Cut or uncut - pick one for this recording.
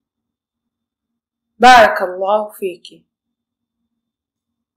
cut